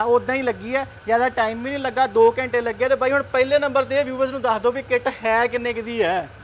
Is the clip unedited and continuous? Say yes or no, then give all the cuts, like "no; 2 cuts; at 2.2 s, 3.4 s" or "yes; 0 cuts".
yes; 0 cuts